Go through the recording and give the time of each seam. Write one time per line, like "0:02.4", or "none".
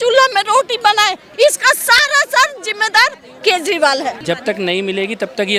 0:01.2
0:04.2

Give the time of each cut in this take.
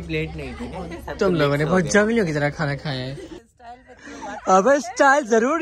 0:03.4

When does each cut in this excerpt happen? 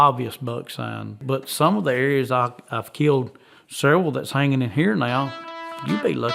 0:01.2

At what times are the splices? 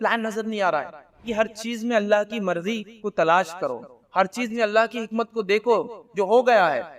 0:01.2

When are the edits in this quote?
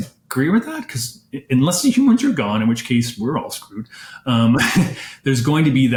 none

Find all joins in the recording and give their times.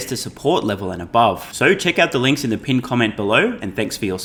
none

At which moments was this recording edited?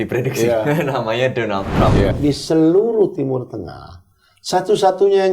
0:02.1

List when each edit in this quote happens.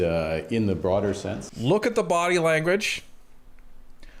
0:01.5

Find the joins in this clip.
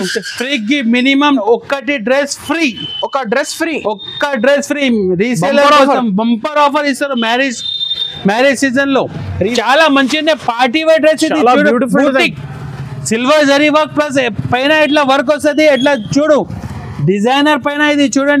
0:01.4
0:09.5

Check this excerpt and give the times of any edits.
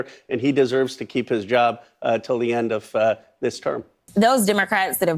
0:04.1

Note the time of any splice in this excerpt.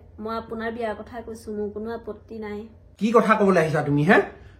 0:02.8

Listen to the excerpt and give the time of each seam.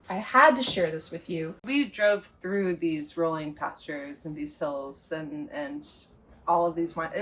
0:01.6

